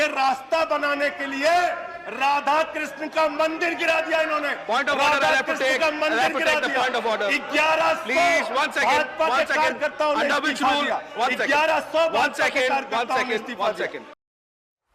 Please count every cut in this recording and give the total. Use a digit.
0